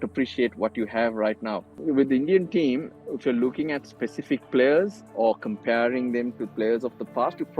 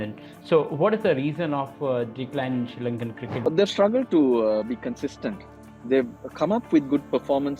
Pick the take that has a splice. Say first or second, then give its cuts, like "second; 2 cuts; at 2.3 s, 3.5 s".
first; 2 cuts; at 1.7 s, 5.1 s